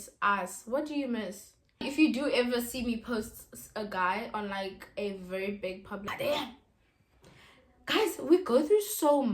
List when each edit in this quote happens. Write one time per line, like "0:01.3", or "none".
0:01.8
0:06.1